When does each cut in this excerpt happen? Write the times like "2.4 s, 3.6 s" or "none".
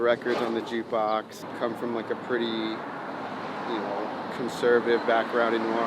1.4 s